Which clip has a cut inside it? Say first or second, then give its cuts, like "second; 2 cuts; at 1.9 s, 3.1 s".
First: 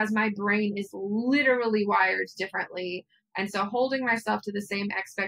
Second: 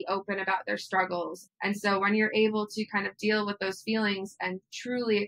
second; 1 cut; at 1.7 s